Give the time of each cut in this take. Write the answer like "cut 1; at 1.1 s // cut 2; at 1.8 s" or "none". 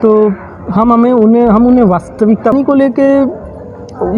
cut 1; at 2.5 s